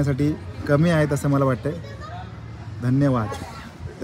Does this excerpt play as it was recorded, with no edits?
yes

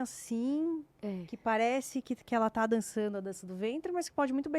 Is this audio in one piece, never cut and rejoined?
yes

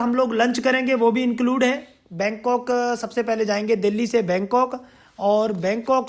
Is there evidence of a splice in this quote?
yes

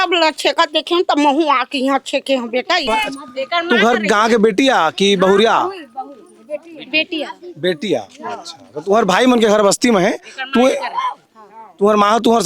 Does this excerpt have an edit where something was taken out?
yes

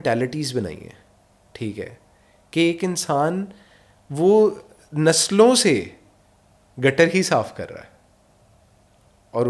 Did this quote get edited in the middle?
no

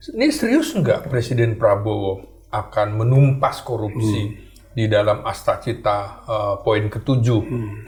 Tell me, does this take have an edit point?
no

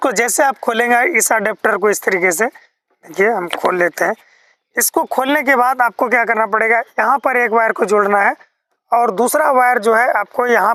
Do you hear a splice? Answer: no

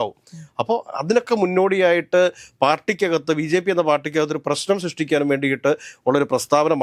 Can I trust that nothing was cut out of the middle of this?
yes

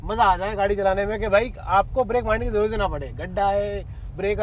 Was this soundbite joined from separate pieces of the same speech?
no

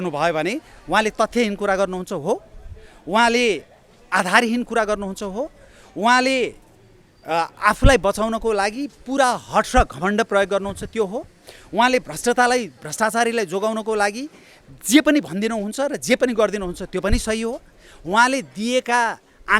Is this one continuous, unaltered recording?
yes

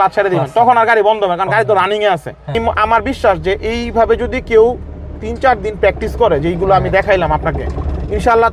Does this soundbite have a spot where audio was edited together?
yes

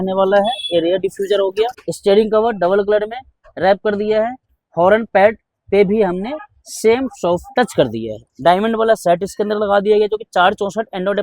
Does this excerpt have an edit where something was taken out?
yes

